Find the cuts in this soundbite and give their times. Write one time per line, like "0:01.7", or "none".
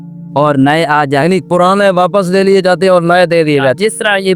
none